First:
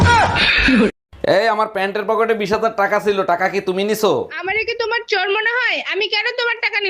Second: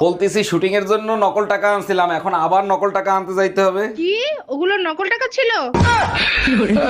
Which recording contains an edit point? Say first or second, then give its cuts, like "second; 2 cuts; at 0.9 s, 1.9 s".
first; 1 cut; at 0.9 s